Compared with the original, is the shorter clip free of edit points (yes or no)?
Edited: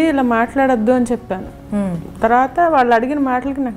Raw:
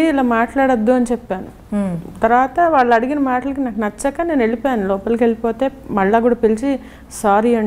yes